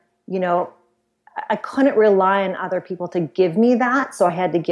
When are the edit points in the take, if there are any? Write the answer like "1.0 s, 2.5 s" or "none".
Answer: none